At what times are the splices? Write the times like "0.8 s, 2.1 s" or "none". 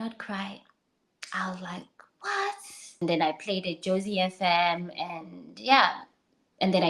3.0 s